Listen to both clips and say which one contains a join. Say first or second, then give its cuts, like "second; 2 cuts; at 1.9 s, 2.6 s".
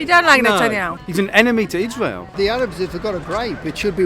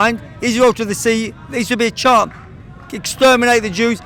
first; 2 cuts; at 0.9 s, 2.2 s